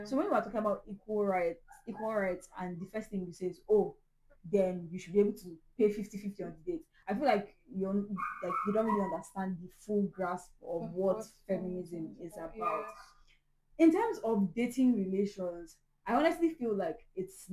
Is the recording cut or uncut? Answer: uncut